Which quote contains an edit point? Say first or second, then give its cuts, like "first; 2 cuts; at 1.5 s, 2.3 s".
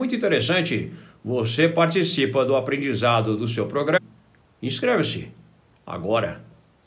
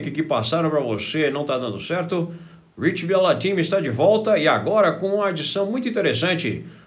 first; 1 cut; at 4.0 s